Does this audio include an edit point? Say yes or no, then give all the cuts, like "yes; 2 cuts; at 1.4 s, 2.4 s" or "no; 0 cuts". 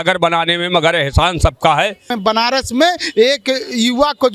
yes; 1 cut; at 2.1 s